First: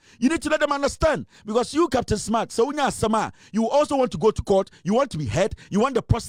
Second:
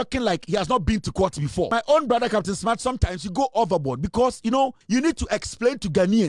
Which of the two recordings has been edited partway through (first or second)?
second